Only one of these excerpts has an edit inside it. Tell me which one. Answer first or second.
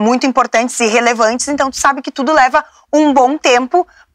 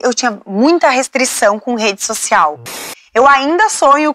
second